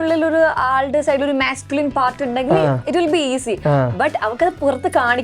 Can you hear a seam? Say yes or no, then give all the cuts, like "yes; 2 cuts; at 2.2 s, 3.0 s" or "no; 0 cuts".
no; 0 cuts